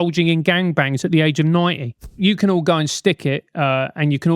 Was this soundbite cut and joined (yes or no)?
yes